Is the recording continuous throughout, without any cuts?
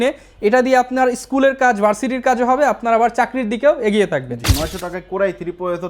no; 1 cut; at 4.4 s

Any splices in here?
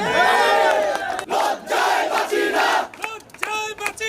no; 0 cuts

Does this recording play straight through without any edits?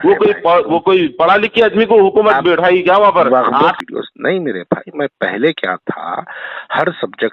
no; 1 cut; at 3.8 s

